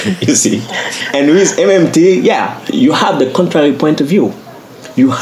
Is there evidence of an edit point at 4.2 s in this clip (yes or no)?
no